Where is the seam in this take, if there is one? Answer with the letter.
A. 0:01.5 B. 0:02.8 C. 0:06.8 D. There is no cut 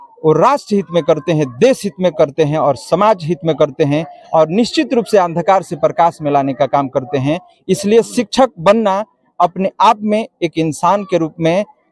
D